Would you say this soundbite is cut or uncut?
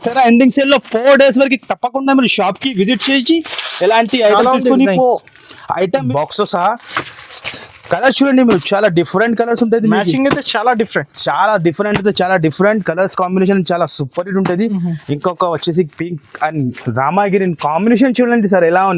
cut